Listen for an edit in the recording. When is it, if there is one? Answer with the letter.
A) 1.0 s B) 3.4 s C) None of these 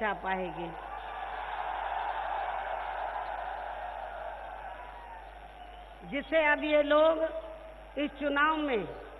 C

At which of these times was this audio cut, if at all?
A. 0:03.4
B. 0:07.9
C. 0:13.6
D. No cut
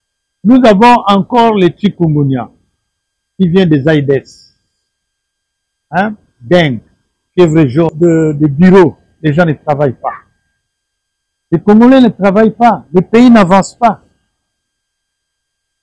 B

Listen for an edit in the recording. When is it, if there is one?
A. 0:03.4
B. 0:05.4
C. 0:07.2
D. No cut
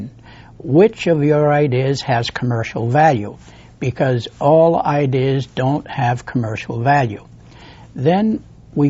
B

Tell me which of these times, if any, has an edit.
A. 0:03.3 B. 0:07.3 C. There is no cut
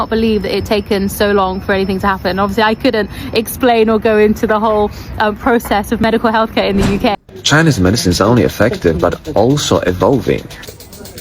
B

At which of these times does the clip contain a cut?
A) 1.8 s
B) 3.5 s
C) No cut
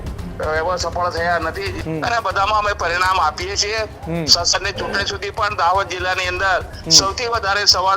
A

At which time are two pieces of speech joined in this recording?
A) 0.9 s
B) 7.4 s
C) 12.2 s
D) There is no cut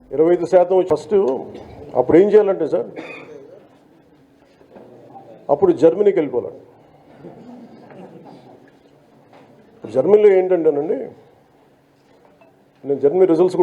A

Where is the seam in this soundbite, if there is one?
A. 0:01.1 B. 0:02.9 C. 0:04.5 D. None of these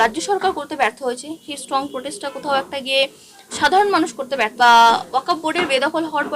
C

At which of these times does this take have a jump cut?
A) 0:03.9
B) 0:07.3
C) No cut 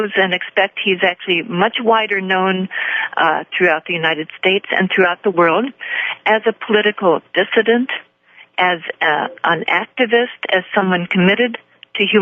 A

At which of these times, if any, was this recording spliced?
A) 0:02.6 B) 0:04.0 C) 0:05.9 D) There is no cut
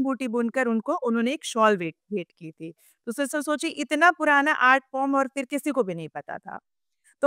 D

